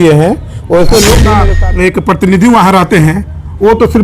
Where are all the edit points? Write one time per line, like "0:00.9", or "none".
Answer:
0:01.5